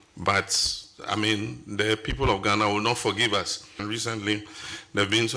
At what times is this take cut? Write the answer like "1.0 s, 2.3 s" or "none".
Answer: 3.8 s